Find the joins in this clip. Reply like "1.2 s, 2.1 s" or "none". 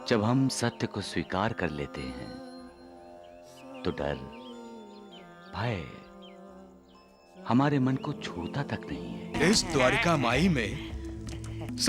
9.3 s